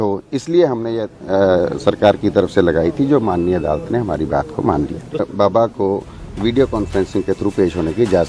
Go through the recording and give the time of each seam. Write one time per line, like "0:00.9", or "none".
0:05.2